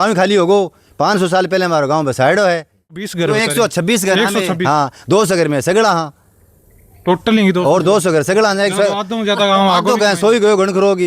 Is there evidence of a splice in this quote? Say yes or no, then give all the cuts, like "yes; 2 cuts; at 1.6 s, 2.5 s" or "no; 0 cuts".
yes; 1 cut; at 3.1 s